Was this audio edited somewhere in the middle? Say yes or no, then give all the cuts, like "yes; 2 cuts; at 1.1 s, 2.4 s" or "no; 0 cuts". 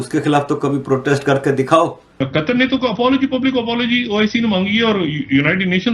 yes; 1 cut; at 2.0 s